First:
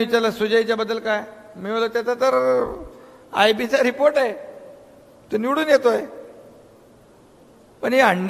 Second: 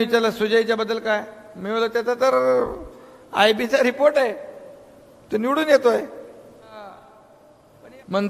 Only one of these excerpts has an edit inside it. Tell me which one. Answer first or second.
second